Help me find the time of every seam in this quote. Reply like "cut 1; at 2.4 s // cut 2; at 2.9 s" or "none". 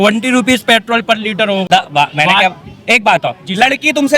cut 1; at 1.7 s